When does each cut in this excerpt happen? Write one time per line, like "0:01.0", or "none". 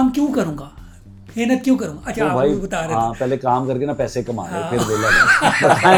none